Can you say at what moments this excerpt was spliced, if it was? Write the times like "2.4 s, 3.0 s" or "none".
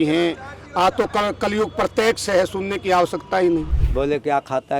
3.8 s